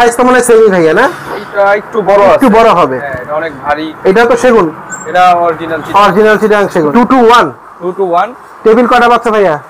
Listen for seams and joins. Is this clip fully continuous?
no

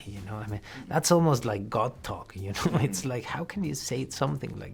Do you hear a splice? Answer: no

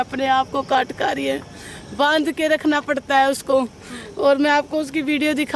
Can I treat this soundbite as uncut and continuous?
yes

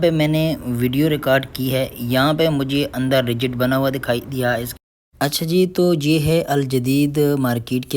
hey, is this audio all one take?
no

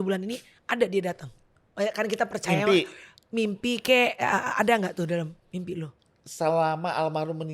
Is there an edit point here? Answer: no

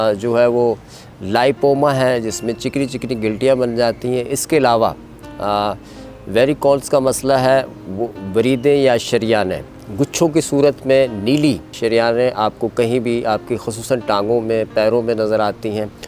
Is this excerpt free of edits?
no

